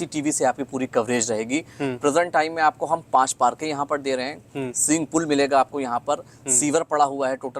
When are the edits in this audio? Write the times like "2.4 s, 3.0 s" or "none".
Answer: none